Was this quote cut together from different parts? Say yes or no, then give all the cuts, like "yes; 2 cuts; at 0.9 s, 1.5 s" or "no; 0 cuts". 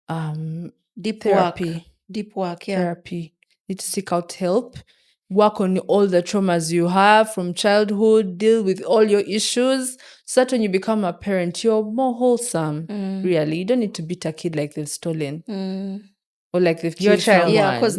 no; 0 cuts